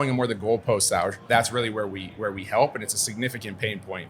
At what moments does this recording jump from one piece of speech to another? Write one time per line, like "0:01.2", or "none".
0:01.2